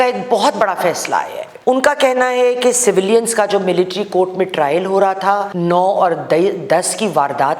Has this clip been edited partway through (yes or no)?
yes